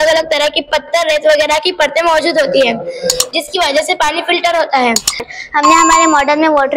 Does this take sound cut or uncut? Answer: cut